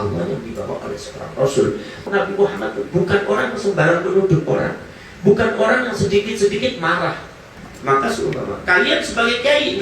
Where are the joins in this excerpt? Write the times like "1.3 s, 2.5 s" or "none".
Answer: 2.0 s, 7.5 s